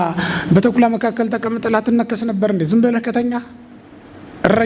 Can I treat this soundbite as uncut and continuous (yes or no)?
yes